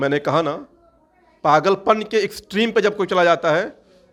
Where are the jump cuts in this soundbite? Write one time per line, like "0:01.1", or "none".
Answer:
none